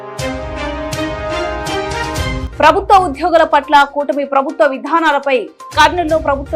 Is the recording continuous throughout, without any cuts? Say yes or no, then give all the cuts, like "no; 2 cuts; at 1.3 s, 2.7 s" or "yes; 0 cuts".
yes; 0 cuts